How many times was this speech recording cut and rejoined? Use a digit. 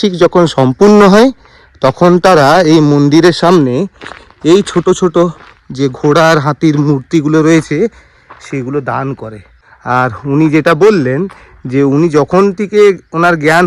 0